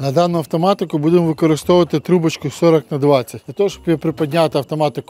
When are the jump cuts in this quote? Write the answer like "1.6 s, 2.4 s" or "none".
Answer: none